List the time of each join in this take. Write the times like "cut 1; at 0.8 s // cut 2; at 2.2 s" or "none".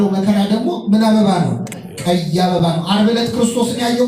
none